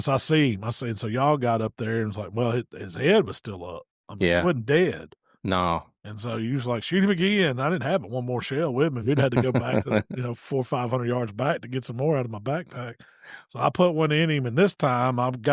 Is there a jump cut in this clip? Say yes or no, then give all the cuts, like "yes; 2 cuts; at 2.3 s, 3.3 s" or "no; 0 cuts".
no; 0 cuts